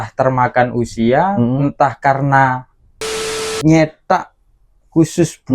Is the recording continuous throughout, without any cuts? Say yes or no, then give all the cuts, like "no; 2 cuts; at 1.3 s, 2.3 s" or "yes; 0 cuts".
no; 1 cut; at 3.1 s